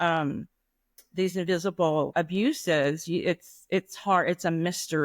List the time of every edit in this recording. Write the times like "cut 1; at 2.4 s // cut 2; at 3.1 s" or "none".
cut 1; at 2.1 s